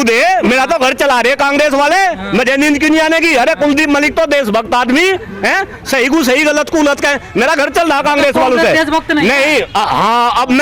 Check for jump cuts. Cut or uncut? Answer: uncut